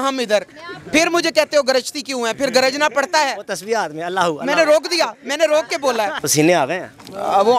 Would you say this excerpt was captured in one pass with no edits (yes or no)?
no